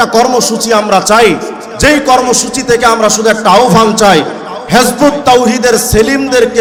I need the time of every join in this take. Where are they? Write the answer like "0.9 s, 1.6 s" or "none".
none